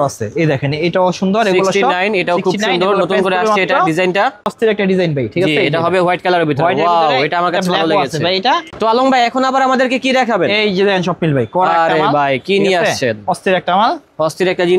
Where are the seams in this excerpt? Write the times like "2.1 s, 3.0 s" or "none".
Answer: 4.5 s, 8.8 s

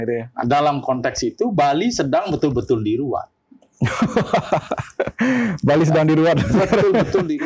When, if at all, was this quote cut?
none

